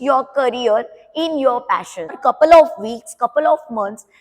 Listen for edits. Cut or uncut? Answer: cut